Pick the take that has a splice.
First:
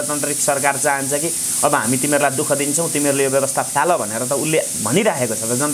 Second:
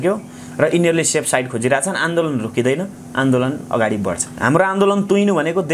second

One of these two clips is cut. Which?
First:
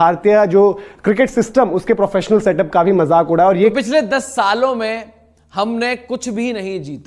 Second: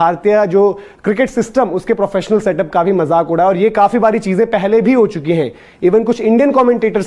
first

